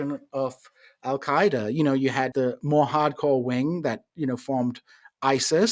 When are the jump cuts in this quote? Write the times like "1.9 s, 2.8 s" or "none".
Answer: 2.3 s